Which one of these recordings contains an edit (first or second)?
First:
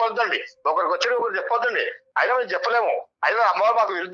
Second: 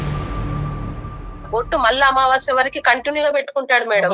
second